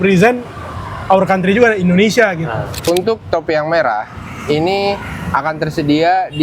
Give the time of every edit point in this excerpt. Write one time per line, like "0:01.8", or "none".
0:02.8